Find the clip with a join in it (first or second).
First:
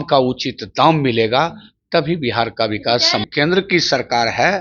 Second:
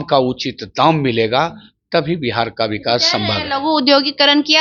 first